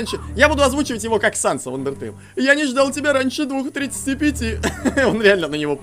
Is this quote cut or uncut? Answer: uncut